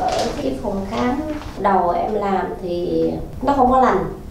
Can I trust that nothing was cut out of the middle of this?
no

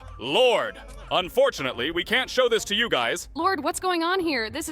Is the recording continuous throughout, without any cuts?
no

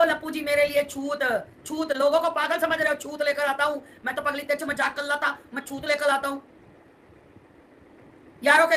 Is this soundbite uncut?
yes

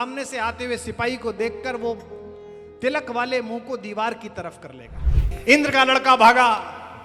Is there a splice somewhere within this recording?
yes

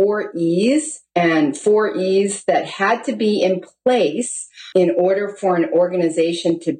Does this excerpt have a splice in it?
yes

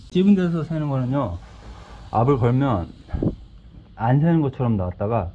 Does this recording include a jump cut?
no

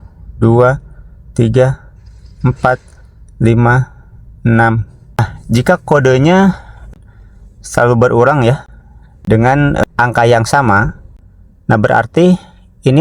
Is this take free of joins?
no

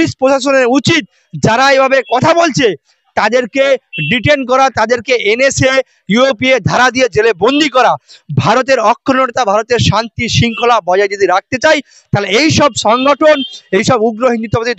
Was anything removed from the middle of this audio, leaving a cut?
no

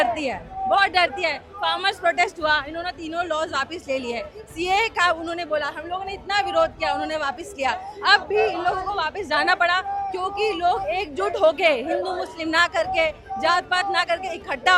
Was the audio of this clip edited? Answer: no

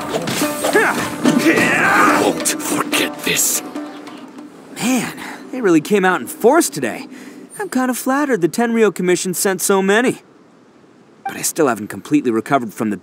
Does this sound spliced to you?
yes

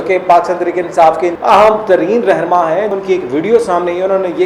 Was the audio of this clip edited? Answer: yes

